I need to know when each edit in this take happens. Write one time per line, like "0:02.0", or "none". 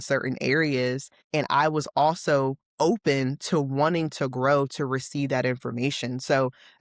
0:01.1